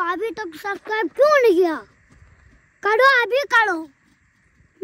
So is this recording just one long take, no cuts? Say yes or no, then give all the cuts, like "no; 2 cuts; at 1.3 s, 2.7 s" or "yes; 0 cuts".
yes; 0 cuts